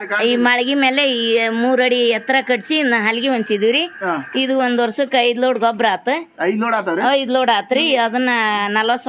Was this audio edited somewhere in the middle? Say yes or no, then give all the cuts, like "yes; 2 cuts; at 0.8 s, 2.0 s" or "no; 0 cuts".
no; 0 cuts